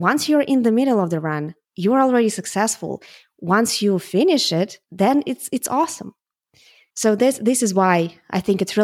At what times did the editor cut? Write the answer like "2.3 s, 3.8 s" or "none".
none